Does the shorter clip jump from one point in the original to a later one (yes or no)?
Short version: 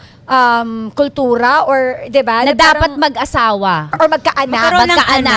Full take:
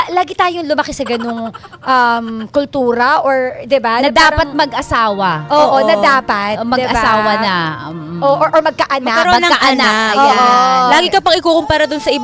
yes